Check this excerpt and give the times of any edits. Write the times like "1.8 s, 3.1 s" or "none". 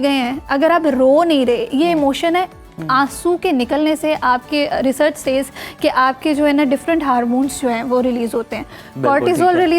none